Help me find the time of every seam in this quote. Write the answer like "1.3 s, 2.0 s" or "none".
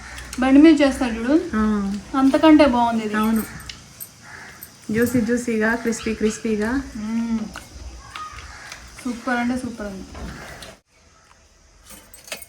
10.8 s